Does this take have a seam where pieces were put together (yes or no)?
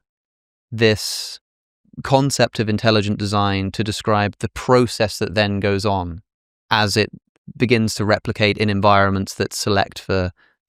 no